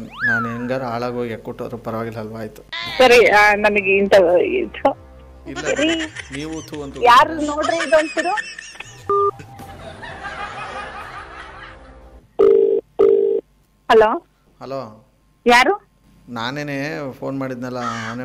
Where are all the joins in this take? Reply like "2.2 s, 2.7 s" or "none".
none